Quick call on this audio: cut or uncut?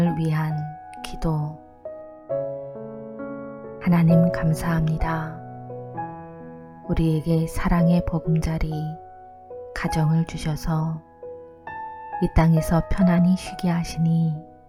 uncut